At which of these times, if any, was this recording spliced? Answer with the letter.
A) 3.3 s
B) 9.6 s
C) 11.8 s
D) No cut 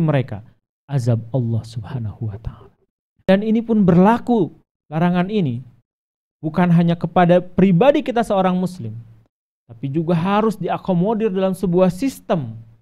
A